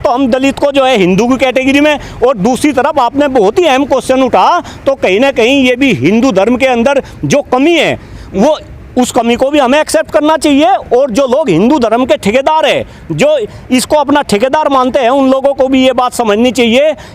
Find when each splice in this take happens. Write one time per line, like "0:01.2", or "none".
none